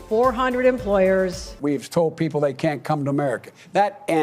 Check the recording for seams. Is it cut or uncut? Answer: cut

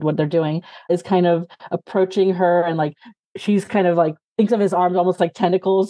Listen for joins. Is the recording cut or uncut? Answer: cut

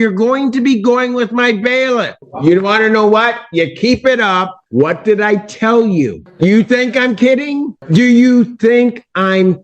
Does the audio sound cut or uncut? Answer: cut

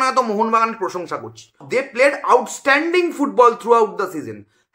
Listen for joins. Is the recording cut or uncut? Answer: cut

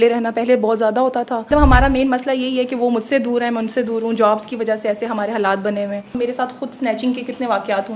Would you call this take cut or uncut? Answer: cut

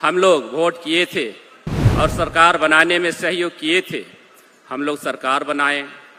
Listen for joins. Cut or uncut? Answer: uncut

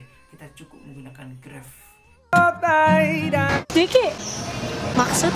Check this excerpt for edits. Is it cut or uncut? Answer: cut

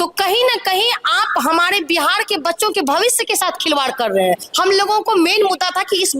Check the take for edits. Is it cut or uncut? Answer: cut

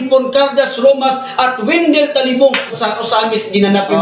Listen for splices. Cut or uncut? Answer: cut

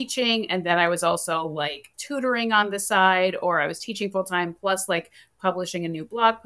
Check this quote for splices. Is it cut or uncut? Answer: uncut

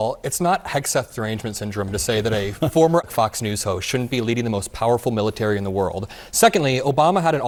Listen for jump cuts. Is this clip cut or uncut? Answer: uncut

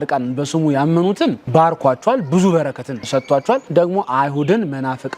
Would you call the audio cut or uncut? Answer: cut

